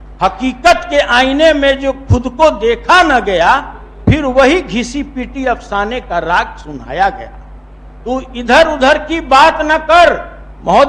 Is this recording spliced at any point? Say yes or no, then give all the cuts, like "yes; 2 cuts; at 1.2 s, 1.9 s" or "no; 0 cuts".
no; 0 cuts